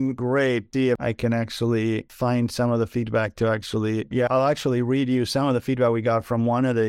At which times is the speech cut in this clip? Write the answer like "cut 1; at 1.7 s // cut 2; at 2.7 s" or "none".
cut 1; at 1.0 s // cut 2; at 2.1 s